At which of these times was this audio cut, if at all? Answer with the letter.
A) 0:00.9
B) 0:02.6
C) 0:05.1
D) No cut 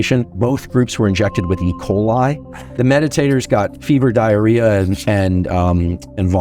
B